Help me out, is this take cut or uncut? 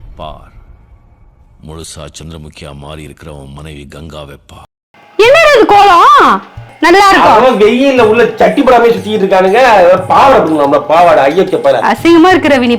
cut